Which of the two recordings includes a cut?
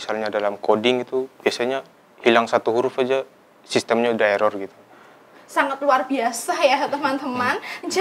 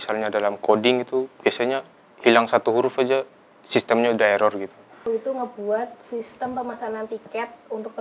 second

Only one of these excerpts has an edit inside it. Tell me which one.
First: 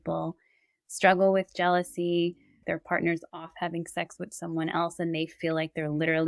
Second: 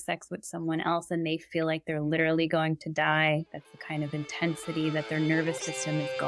first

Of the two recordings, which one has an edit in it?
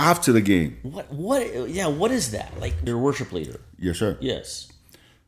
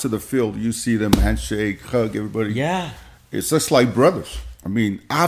first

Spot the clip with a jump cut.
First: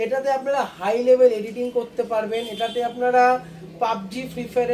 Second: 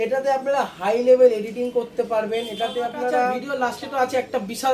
second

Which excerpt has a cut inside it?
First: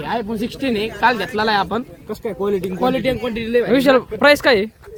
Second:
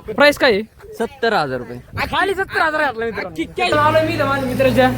second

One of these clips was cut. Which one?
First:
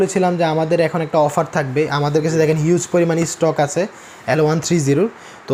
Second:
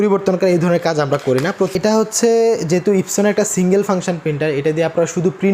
second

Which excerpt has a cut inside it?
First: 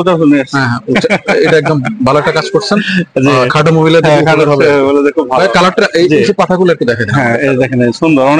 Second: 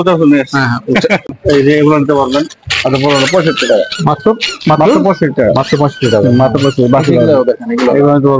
second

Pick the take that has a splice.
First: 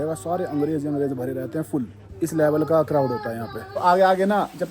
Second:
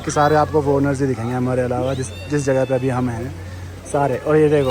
first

